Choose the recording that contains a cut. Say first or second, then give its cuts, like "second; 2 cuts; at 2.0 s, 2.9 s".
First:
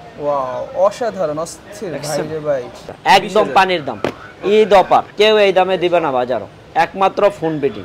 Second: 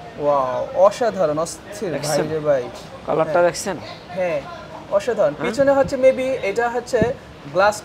first; 2 cuts; at 2.9 s, 5.1 s